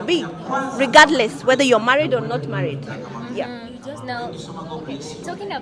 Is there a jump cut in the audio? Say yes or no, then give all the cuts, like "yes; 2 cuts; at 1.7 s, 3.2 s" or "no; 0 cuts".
no; 0 cuts